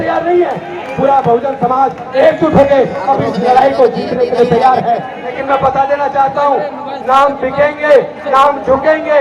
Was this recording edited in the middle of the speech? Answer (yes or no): yes